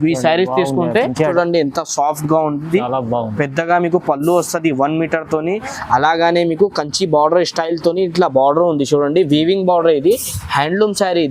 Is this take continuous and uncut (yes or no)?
no